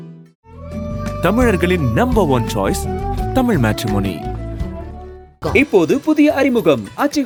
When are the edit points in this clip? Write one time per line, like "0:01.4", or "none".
none